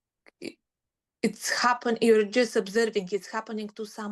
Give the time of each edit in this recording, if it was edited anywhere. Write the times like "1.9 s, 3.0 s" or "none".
none

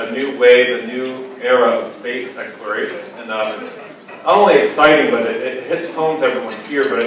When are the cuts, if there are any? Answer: 1.5 s

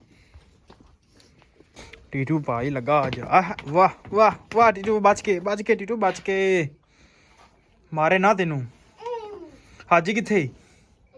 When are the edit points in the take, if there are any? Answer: 1.8 s

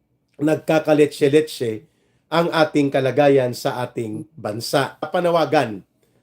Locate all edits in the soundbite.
5.1 s

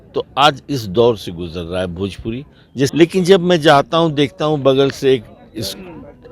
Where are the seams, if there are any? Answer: 2.9 s

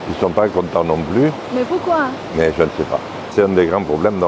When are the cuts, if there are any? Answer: 3.3 s

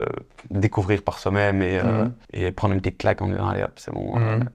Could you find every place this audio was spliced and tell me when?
2.2 s

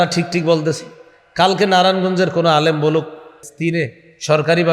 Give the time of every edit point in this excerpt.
3.5 s

